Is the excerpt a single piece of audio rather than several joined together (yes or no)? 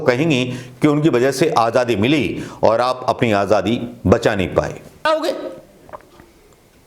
no